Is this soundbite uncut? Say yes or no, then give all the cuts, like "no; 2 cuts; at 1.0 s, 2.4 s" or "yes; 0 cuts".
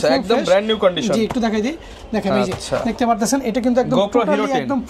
yes; 0 cuts